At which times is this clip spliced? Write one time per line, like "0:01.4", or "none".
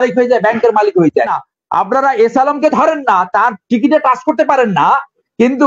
0:01.3